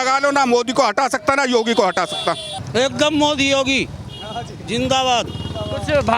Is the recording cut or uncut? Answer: cut